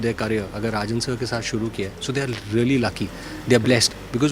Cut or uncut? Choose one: uncut